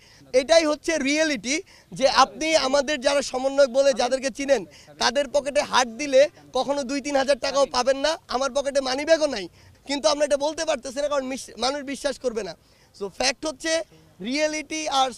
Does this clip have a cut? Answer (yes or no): no